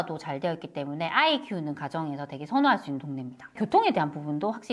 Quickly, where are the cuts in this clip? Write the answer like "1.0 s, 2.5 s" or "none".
3.5 s